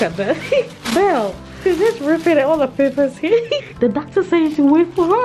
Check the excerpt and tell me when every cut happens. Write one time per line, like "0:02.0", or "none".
0:01.4
0:03.6